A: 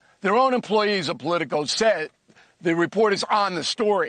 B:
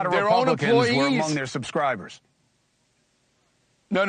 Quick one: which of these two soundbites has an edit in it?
A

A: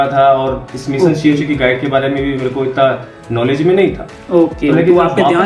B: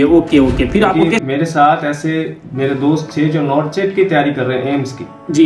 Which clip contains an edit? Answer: B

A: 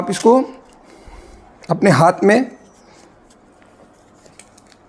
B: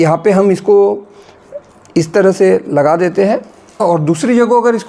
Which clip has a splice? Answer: B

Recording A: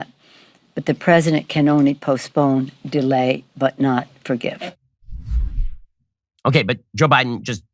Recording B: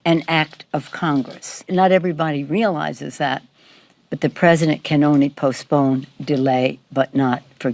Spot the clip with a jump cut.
B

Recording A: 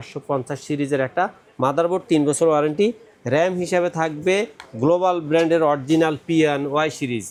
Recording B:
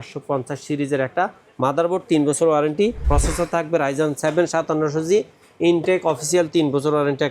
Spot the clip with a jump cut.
B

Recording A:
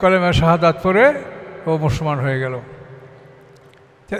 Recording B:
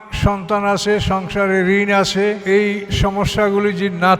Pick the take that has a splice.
B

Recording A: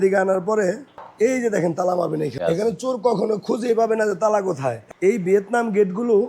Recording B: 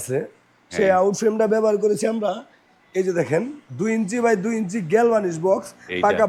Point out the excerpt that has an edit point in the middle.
A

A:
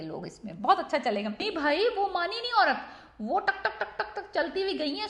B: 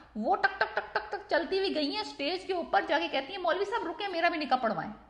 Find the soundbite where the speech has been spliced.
A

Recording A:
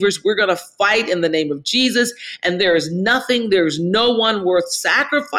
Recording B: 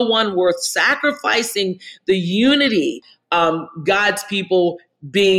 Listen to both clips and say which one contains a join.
B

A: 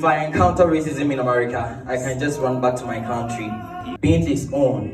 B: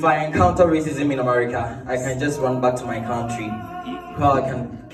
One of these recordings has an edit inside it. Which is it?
A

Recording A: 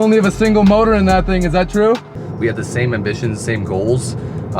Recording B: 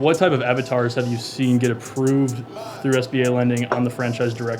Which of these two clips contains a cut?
A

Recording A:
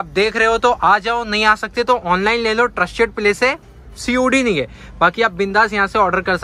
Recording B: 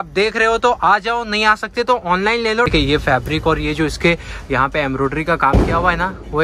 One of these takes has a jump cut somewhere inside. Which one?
B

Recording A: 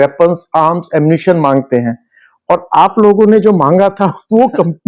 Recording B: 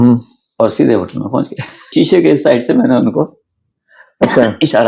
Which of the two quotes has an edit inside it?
B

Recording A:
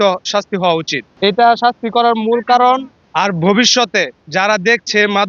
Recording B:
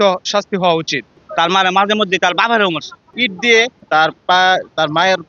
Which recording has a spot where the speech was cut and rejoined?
B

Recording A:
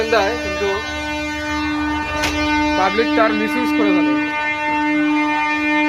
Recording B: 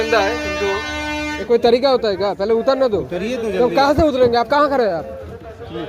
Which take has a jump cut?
B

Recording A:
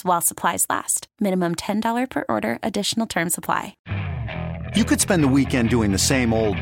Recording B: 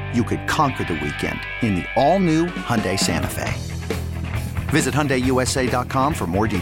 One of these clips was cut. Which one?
A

